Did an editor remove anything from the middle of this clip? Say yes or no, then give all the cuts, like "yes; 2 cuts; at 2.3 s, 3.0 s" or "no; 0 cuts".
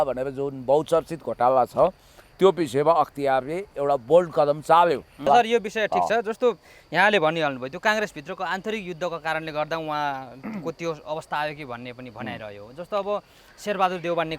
yes; 1 cut; at 5.3 s